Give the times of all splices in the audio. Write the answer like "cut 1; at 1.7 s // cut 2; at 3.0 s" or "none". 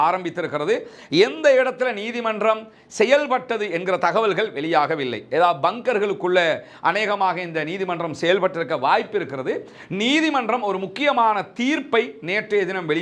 none

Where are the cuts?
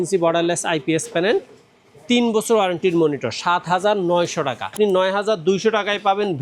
cut 1; at 4.7 s

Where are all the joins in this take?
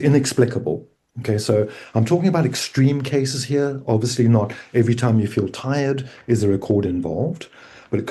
none

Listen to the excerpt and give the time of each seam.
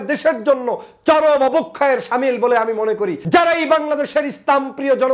cut 1; at 3.2 s

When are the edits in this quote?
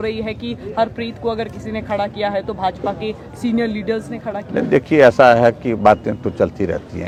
none

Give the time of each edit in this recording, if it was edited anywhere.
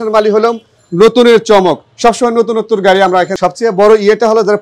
cut 1; at 3.3 s

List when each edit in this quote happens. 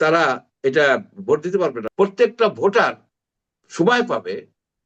cut 1; at 1.8 s

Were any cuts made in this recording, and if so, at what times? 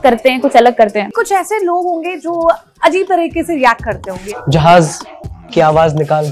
cut 1; at 1.2 s // cut 2; at 4.2 s

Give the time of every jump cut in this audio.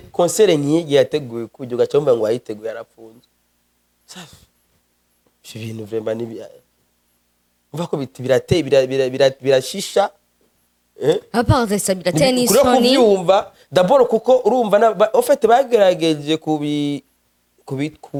none

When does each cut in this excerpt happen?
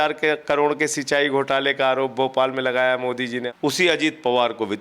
cut 1; at 3.4 s

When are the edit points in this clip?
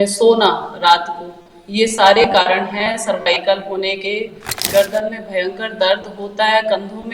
cut 1; at 4.6 s

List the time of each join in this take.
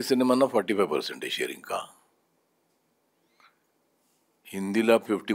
none

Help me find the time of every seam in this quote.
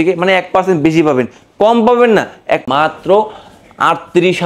cut 1; at 2.6 s

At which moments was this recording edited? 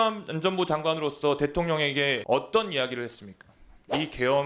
cut 1; at 2.2 s

